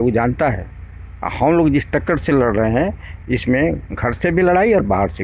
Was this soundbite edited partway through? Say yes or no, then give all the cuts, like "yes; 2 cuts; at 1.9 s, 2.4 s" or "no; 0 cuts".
no; 0 cuts